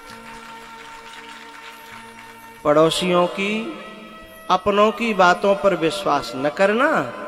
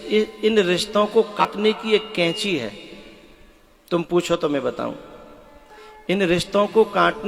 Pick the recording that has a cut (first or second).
second